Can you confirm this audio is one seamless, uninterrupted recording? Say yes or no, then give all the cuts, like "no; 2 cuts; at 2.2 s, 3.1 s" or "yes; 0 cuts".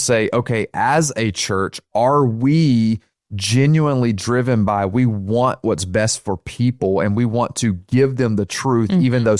yes; 0 cuts